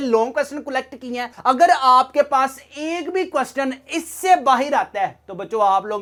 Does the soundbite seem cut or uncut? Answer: uncut